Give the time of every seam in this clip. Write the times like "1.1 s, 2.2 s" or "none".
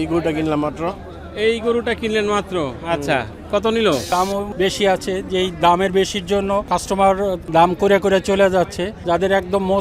4.2 s, 6.6 s, 7.4 s, 8.9 s